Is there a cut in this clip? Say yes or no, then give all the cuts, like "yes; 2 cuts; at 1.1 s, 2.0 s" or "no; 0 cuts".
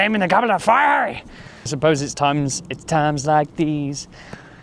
yes; 1 cut; at 1.7 s